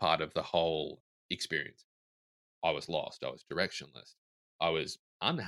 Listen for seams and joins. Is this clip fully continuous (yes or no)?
no